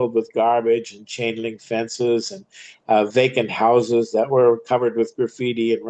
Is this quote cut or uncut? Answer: uncut